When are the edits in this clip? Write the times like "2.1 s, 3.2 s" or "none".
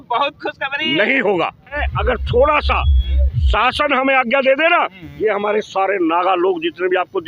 1.9 s